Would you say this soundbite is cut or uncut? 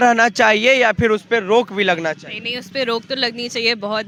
uncut